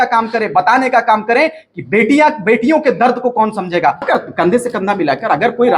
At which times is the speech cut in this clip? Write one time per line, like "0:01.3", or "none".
0:04.1